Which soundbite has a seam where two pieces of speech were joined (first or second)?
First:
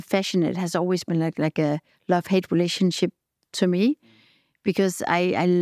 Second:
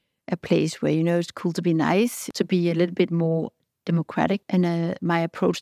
second